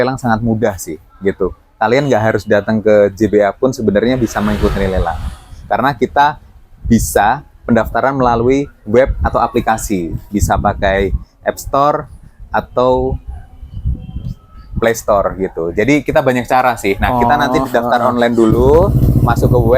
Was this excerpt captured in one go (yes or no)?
yes